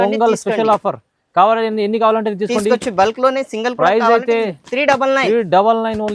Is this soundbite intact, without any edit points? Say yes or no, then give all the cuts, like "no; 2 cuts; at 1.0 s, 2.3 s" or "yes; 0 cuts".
yes; 0 cuts